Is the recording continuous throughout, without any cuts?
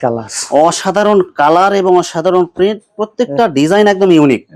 yes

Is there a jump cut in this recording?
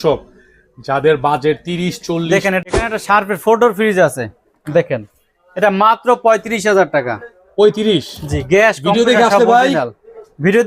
yes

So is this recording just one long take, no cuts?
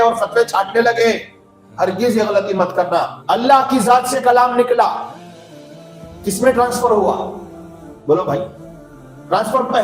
no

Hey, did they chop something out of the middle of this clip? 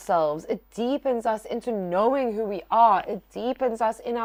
no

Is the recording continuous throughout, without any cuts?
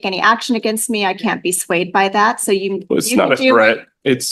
yes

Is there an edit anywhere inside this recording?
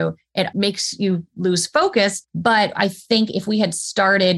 yes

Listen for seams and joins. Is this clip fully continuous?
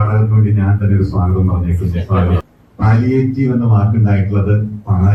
no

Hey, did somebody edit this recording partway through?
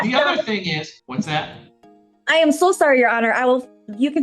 yes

